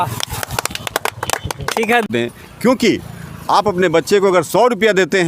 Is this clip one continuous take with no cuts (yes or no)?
no